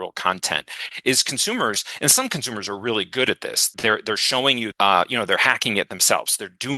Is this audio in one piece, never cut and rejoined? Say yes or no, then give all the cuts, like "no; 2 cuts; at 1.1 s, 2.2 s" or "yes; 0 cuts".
no; 2 cuts; at 3.7 s, 4.7 s